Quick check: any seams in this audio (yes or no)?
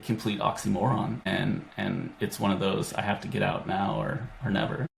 yes